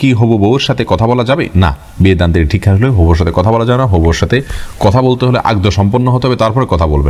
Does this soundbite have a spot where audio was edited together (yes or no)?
no